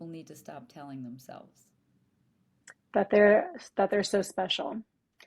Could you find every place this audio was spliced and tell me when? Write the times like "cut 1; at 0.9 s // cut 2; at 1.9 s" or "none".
none